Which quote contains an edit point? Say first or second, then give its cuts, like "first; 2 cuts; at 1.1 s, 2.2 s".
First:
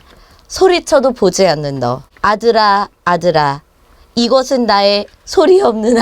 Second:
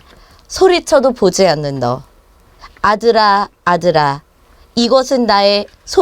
first; 1 cut; at 2.1 s